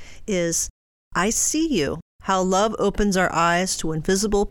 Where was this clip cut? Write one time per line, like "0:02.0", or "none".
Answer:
0:02.1